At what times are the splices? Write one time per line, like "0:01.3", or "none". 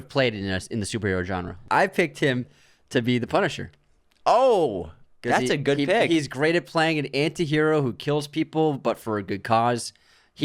0:01.6